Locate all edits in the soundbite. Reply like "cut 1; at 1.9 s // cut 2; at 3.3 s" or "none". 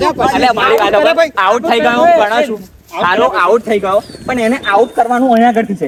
none

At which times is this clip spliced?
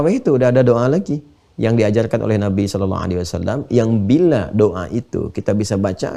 none

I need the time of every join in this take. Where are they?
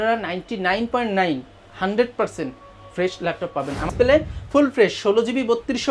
cut 1; at 3.9 s

